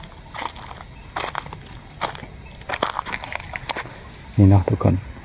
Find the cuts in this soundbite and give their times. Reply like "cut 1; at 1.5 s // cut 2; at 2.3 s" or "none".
cut 1; at 3.0 s